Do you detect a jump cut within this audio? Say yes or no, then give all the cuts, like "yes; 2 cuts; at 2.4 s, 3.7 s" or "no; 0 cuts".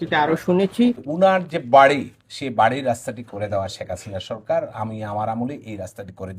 yes; 1 cut; at 1.1 s